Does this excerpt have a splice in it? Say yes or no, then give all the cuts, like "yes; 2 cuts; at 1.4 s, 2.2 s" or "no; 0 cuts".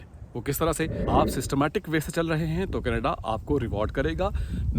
yes; 1 cut; at 1.0 s